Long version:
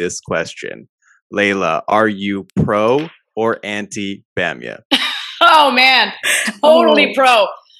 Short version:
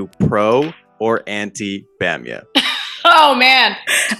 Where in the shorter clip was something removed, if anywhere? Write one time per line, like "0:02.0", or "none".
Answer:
none